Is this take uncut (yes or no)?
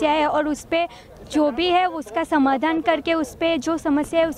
yes